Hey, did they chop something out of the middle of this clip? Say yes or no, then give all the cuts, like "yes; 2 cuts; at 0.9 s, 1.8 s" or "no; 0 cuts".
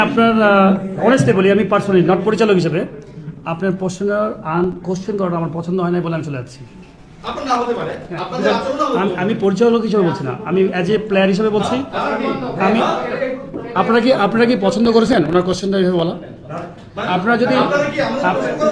no; 0 cuts